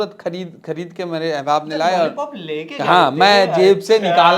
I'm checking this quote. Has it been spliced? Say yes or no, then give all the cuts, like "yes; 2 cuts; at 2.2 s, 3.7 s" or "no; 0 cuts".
no; 0 cuts